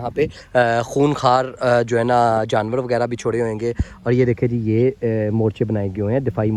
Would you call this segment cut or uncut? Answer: uncut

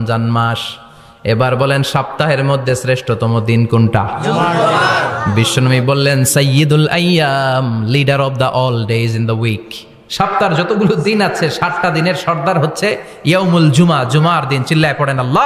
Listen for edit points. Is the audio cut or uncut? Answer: uncut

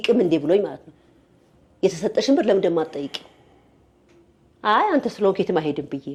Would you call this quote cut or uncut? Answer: uncut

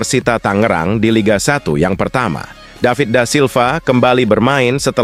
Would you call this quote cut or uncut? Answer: uncut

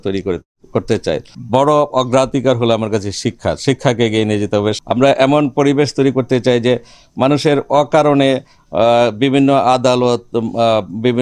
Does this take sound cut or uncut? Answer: cut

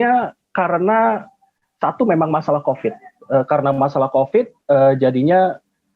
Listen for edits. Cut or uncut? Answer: uncut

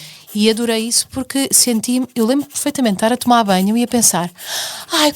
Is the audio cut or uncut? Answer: cut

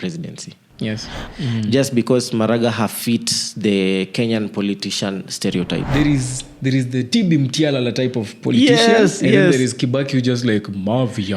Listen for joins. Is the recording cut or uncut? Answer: cut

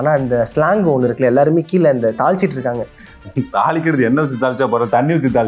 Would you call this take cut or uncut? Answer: cut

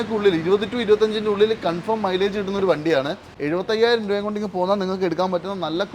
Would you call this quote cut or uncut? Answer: cut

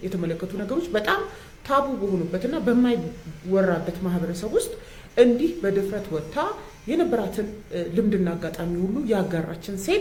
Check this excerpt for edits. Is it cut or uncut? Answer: uncut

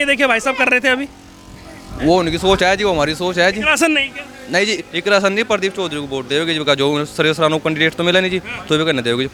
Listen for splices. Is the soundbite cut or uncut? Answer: uncut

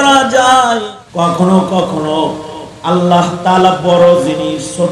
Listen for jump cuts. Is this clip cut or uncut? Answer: cut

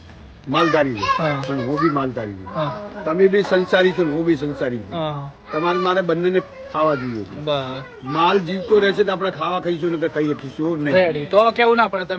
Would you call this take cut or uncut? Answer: uncut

